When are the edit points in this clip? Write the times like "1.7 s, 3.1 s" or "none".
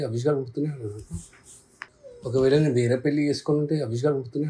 1.7 s